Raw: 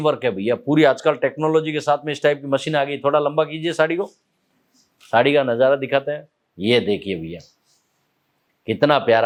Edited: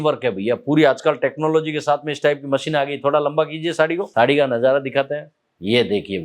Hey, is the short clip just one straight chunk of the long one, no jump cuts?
no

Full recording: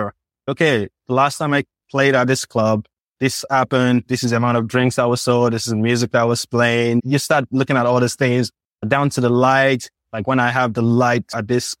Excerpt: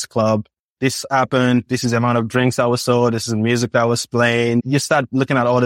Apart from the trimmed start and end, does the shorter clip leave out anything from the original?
no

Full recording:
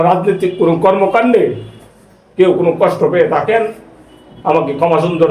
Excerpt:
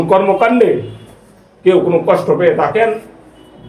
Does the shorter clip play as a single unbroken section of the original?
yes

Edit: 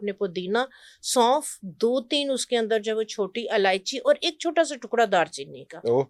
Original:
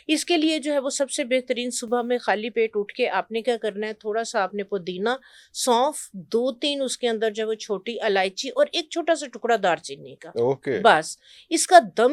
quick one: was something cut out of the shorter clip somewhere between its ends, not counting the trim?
no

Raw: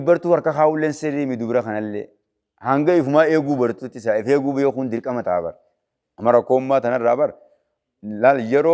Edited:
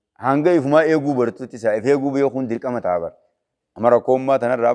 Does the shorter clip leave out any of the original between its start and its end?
no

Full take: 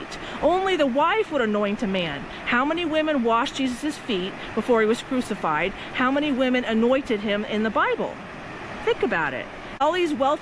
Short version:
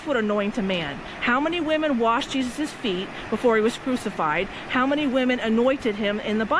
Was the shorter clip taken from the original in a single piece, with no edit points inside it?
yes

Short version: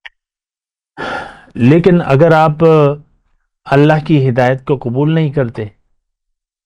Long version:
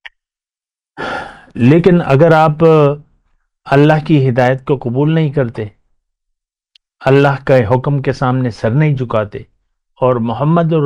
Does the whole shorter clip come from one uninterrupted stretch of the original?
yes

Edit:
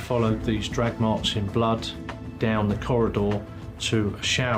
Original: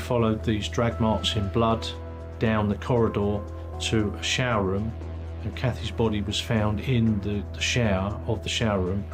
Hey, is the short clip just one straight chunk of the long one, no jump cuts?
yes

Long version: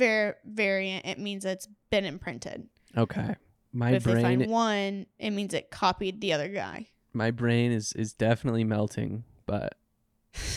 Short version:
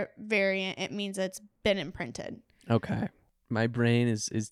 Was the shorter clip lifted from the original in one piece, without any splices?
no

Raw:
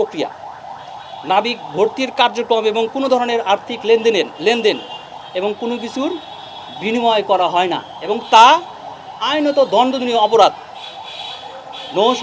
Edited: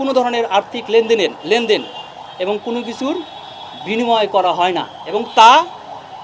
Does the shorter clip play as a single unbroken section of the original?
yes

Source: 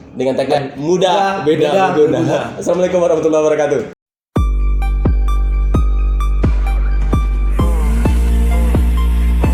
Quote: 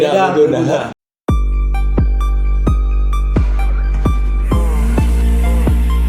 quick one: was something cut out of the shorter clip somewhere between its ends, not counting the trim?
yes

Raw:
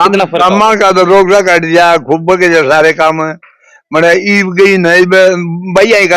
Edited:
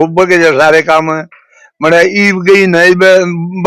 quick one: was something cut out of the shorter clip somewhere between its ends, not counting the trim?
no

